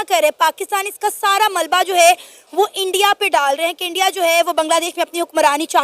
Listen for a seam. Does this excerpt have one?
no; 0 cuts

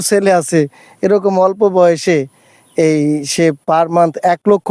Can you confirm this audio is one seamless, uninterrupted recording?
yes; 0 cuts

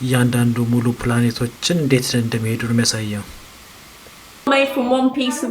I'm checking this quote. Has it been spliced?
yes; 1 cut; at 4.5 s

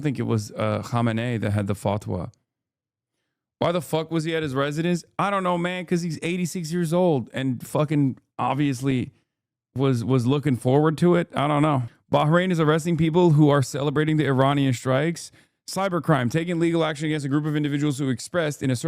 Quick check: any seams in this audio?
no; 0 cuts

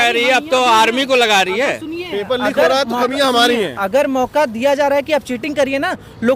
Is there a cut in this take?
no; 0 cuts

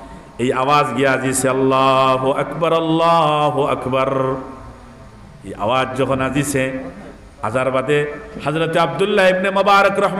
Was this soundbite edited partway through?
no; 0 cuts

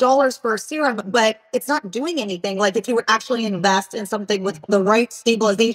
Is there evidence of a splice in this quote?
yes; 1 cut; at 4.7 s

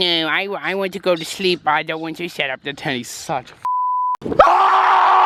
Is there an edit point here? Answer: no; 0 cuts

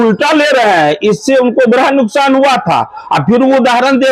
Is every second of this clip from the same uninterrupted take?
yes; 0 cuts

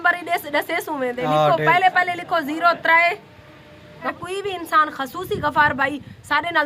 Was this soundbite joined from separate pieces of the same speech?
yes; 1 cut; at 4.1 s

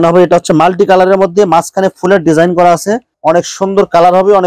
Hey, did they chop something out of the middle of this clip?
yes; 1 cut; at 3.1 s

